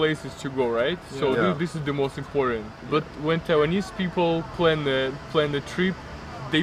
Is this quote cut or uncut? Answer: uncut